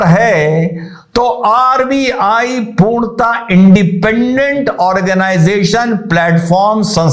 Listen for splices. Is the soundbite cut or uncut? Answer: uncut